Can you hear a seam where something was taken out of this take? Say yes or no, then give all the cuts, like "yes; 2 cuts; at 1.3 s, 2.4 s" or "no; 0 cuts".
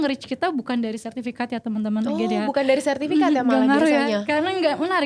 no; 0 cuts